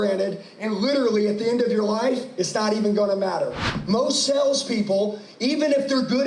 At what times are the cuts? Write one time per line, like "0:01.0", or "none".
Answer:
0:03.7